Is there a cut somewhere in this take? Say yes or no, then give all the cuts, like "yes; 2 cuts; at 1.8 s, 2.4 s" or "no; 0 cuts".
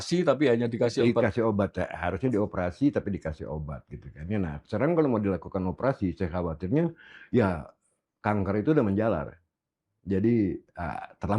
no; 0 cuts